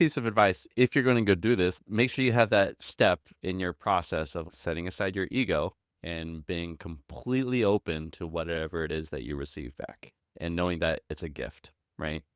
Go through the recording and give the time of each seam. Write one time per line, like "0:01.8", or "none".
0:01.8
0:04.4
0:10.3